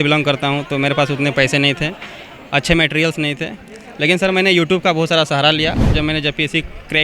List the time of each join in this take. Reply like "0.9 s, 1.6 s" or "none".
5.8 s